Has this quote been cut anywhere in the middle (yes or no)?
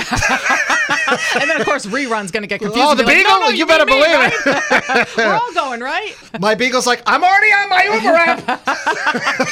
yes